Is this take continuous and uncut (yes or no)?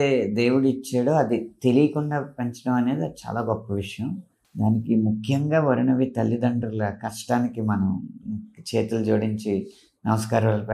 no